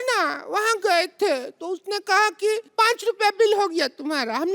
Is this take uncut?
no; 1 cut; at 2.7 s

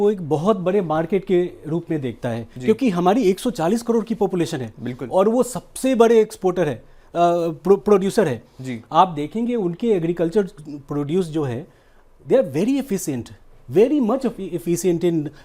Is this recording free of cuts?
yes; 0 cuts

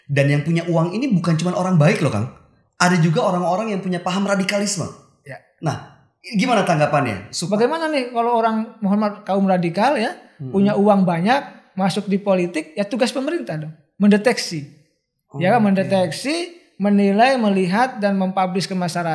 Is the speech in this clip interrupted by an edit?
yes; 1 cut; at 7.3 s

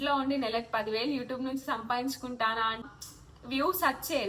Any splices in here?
yes; 1 cut; at 2.8 s

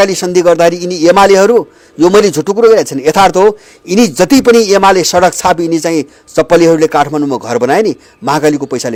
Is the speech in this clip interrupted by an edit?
no; 0 cuts

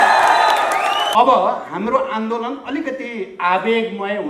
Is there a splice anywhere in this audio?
yes; 1 cut; at 1.1 s

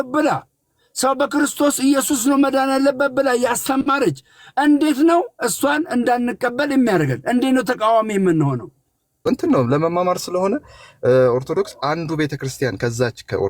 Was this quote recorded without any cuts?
yes; 0 cuts

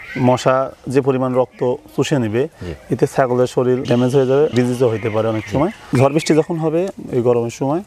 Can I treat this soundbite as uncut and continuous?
no; 3 cuts; at 3.8 s, 4.5 s, 5.8 s

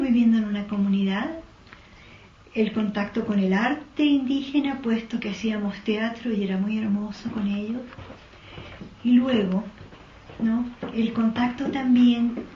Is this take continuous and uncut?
yes; 0 cuts

